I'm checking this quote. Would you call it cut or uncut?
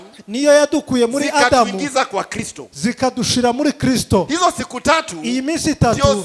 uncut